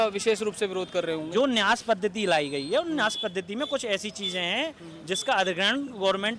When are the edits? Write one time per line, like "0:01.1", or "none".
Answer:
none